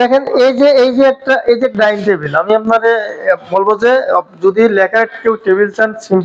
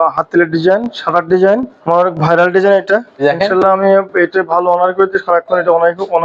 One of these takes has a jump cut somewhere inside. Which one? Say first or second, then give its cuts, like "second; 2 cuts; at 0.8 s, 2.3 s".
second; 2 cuts; at 1.8 s, 3.2 s